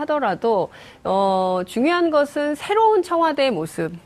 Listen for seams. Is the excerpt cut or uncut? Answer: uncut